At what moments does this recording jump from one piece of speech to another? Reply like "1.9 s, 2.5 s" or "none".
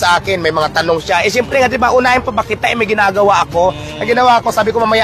none